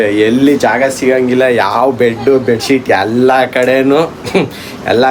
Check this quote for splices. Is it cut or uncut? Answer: uncut